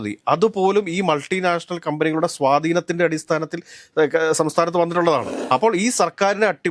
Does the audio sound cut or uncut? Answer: cut